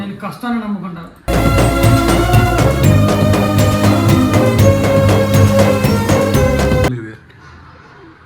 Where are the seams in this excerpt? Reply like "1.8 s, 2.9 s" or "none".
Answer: 7.0 s